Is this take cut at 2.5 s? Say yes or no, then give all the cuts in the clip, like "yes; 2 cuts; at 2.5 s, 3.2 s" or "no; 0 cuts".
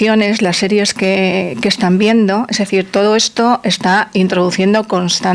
no; 0 cuts